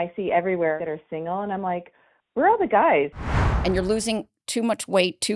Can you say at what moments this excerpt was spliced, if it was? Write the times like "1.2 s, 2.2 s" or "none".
0.8 s, 3.1 s